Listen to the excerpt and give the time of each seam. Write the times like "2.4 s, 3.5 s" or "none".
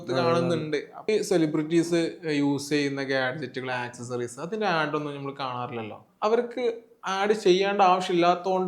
1.1 s, 6.0 s